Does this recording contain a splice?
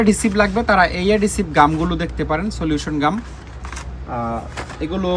no; 0 cuts

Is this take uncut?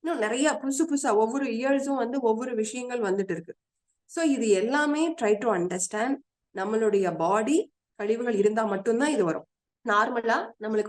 no; 1 cut; at 9.7 s

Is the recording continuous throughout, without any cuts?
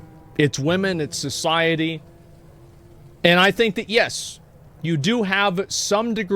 yes; 0 cuts

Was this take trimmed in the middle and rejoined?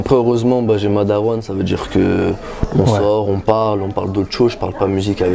no; 0 cuts

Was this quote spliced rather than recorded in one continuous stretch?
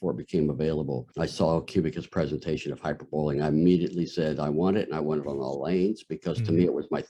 no; 0 cuts

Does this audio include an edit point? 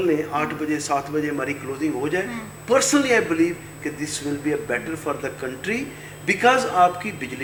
no; 0 cuts

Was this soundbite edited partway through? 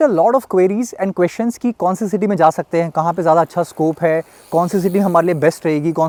no; 0 cuts

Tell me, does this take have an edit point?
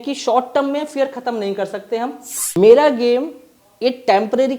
yes; 1 cut; at 2.6 s

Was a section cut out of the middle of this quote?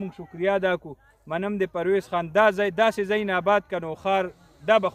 no; 0 cuts

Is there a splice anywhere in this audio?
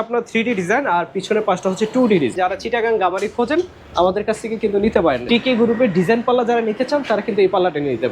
yes; 2 cuts; at 2.3 s, 5.2 s

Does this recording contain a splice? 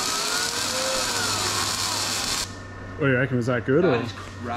yes; 1 cut; at 2.4 s

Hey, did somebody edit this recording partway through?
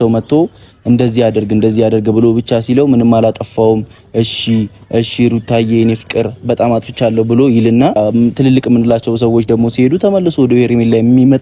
yes; 1 cut; at 8.0 s

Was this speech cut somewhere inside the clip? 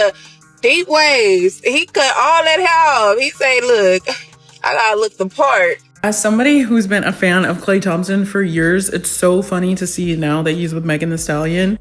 yes; 1 cut; at 5.9 s

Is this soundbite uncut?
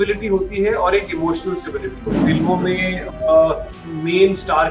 no; 2 cuts; at 2.2 s, 3.8 s

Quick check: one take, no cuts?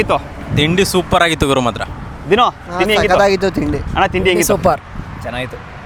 yes; 0 cuts

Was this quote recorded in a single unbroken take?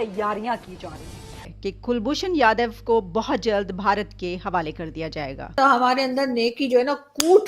no; 2 cuts; at 1.3 s, 5.5 s

